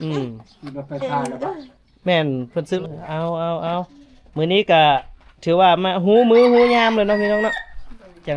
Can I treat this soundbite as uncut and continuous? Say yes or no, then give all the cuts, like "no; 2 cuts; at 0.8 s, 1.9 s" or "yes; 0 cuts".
no; 1 cut; at 2.8 s